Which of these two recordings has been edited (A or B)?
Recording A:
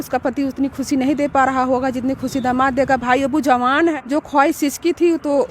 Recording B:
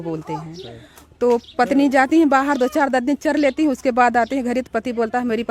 A